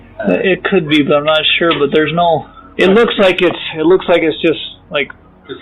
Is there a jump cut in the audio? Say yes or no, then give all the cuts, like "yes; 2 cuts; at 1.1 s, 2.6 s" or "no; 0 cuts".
no; 0 cuts